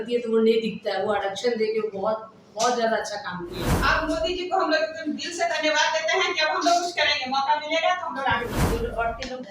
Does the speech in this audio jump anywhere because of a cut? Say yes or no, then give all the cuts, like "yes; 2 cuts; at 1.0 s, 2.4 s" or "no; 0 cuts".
yes; 2 cuts; at 3.7 s, 8.6 s